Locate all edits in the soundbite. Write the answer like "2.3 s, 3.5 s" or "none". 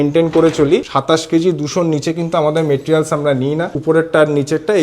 0.9 s, 3.7 s

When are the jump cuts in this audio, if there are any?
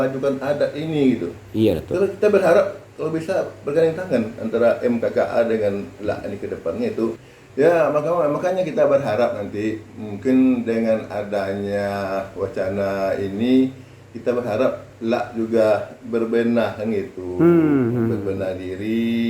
7.3 s

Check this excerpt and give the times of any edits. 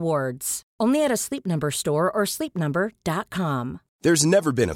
3.8 s

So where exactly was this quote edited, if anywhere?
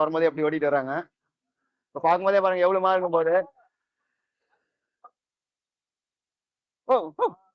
none

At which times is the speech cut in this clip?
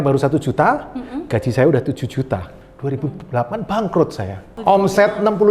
2.5 s, 4.5 s

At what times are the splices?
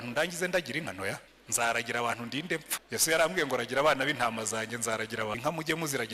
1.4 s, 2.8 s, 5.3 s

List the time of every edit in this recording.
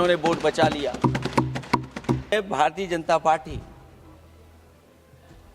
2.3 s

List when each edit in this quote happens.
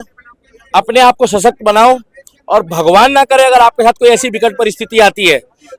none

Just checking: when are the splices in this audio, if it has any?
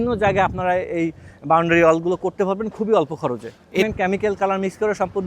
3.8 s

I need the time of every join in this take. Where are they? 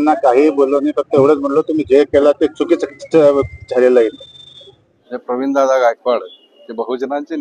5.1 s

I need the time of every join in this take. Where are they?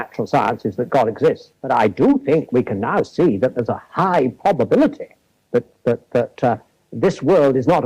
1.5 s

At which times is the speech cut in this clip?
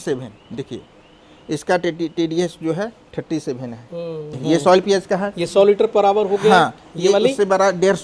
4.3 s

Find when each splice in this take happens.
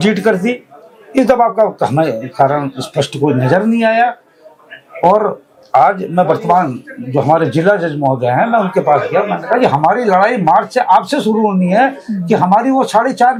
none

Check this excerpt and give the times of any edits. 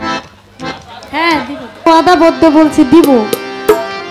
1.9 s

